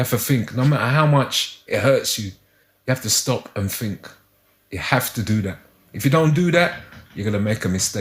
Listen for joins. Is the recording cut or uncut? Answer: uncut